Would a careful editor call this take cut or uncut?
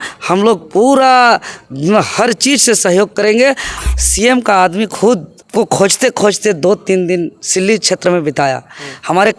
cut